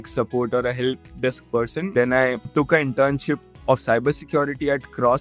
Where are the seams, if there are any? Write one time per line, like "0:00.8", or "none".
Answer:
0:01.9
0:02.4